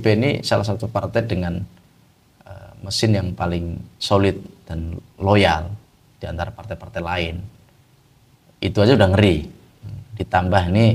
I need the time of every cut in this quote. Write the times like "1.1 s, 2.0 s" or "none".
none